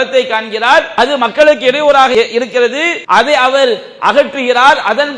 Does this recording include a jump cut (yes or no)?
yes